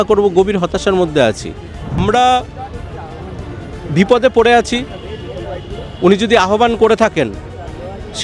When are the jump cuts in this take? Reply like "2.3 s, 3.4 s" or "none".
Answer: 2.0 s